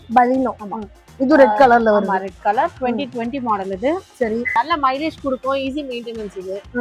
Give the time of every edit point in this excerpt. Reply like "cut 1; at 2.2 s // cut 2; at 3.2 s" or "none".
cut 1; at 4.5 s